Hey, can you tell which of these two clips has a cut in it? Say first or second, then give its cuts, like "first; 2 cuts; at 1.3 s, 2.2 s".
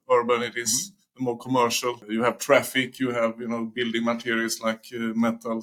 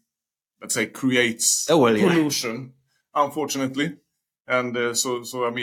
first; 1 cut; at 2.0 s